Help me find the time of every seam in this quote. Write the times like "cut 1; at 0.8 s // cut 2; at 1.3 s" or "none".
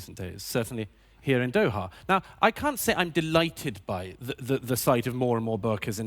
cut 1; at 1.5 s